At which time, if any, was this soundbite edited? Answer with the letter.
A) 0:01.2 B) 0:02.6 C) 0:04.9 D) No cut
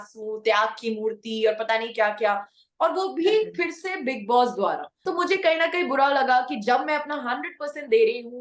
C